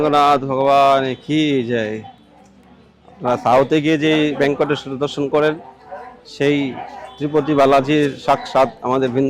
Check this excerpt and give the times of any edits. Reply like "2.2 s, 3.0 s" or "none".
none